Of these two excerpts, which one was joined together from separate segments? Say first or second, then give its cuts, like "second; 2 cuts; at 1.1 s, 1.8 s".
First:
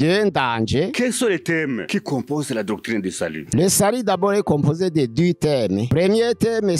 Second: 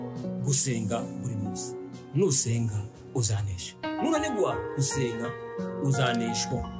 first; 4 cuts; at 0.9 s, 1.8 s, 3.4 s, 5.9 s